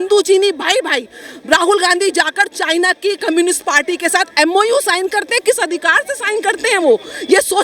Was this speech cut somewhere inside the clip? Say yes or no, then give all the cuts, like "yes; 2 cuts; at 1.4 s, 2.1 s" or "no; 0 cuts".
no; 0 cuts